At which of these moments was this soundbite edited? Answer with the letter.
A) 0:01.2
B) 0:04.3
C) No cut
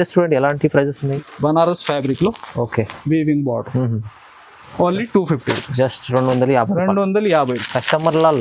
A